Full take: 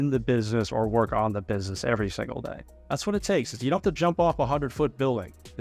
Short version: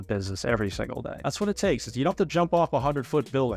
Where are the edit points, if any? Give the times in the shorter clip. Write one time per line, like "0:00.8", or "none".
0:01.1